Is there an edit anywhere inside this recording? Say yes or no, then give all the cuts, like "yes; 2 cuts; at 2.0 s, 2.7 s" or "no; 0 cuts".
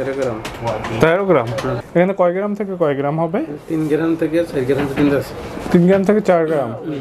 yes; 1 cut; at 1.8 s